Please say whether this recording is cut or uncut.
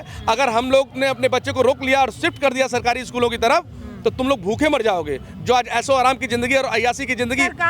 uncut